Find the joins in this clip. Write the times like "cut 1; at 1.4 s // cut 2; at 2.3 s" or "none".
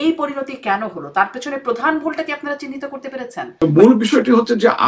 cut 1; at 3.6 s